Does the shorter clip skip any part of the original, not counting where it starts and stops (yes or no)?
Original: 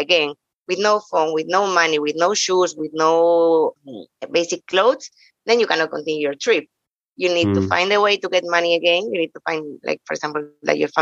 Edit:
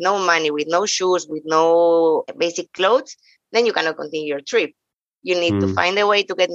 yes